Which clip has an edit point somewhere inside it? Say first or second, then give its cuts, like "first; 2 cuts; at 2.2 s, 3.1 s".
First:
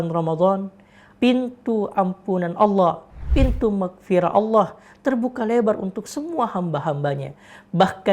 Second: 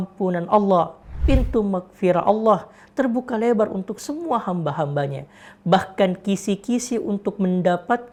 first; 1 cut; at 1.1 s